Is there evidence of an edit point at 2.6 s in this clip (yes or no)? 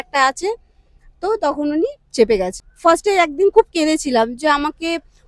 yes